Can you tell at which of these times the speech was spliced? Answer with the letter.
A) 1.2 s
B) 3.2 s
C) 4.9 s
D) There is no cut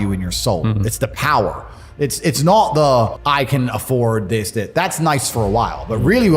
B